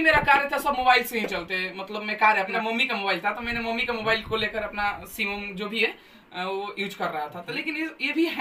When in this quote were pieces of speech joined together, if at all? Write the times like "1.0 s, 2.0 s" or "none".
2.5 s